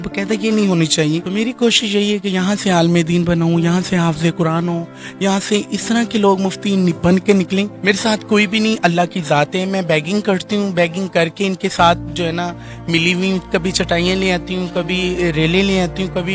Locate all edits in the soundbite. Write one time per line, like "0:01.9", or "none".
0:01.2
0:07.7